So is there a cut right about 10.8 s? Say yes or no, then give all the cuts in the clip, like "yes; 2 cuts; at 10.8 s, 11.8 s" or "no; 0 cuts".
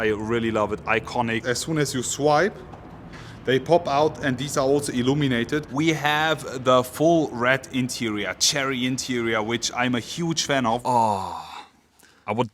yes; 3 cuts; at 1.4 s, 5.7 s, 10.8 s